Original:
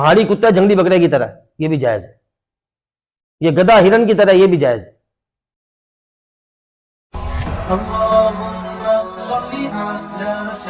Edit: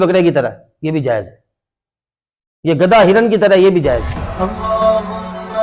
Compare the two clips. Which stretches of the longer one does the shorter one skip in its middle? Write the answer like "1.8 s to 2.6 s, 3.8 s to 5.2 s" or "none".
5.0 s to 7.5 s